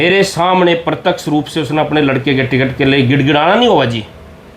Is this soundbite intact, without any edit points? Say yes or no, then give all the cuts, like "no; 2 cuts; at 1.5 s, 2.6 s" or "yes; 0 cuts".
yes; 0 cuts